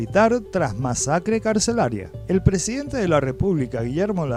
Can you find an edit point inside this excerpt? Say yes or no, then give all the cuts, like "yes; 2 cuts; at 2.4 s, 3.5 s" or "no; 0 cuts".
no; 0 cuts